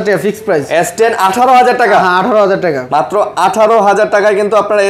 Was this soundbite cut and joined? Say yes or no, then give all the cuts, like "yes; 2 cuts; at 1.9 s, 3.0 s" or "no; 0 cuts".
no; 0 cuts